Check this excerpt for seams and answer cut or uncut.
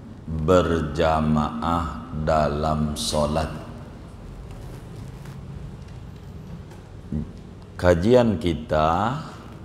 uncut